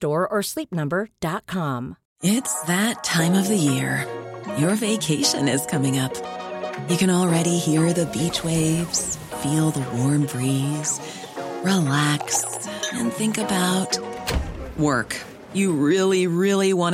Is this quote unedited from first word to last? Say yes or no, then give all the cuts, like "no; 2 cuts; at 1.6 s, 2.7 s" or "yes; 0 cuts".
no; 1 cut; at 2.1 s